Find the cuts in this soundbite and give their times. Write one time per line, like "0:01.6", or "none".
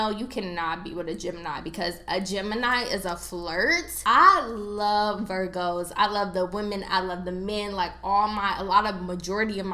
0:03.9

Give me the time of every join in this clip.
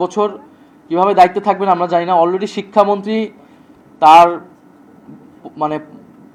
none

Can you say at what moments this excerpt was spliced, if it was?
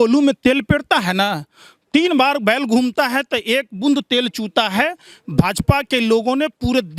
none

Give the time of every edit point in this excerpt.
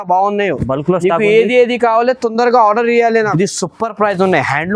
0:03.3

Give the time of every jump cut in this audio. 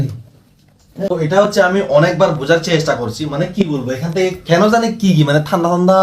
0:00.9

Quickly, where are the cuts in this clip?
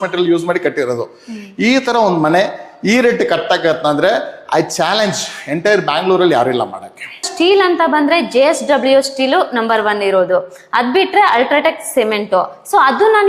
0:07.3

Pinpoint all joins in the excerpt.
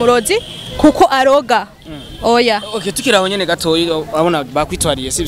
none

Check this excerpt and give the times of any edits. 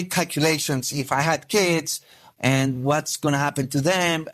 0:02.2

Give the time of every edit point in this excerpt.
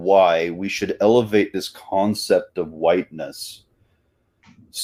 none

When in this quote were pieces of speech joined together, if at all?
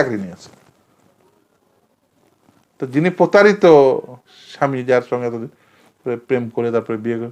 none

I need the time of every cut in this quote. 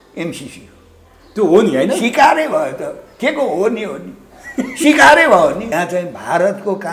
0:05.6

